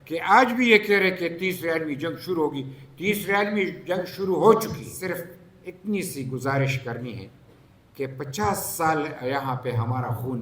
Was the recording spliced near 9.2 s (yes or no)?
no